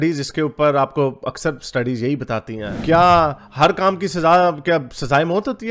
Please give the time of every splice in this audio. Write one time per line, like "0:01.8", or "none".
0:02.7

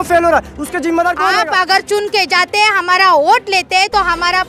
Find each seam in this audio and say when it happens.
0:01.3

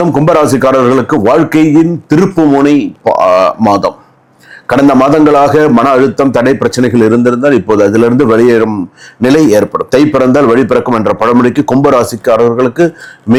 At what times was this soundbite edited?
none

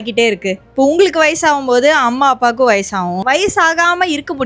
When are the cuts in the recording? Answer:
0:03.2

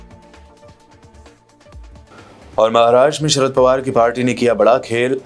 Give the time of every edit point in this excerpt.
0:01.3

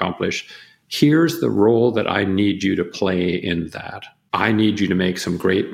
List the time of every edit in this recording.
0:04.2

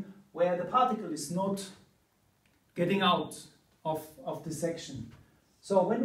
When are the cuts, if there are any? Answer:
none

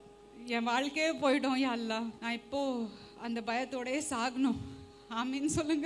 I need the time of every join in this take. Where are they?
0:02.2

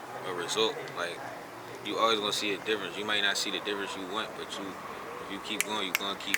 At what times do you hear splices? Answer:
none

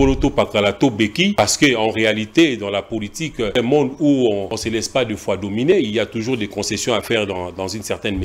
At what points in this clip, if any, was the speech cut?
0:01.3
0:03.6
0:04.5

